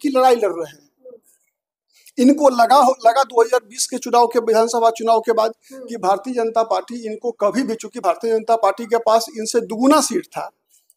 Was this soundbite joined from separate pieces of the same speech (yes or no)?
no